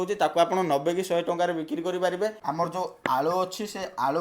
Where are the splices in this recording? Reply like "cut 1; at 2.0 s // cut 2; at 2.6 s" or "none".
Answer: cut 1; at 2.4 s